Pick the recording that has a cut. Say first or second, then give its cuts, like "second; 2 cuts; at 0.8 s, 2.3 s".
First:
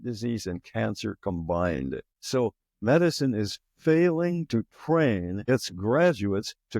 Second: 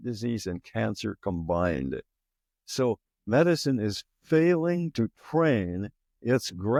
first; 2 cuts; at 2.1 s, 5.4 s